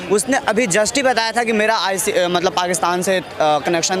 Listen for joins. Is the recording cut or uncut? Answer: uncut